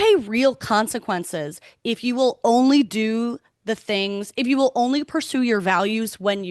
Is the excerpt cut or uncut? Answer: uncut